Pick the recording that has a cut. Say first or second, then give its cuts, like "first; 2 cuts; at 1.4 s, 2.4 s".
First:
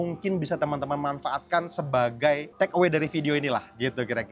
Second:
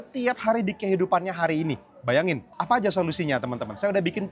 second; 1 cut; at 2.5 s